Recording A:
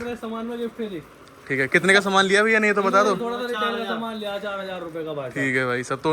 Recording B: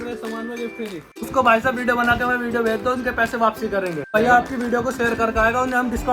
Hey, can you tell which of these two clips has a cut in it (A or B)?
B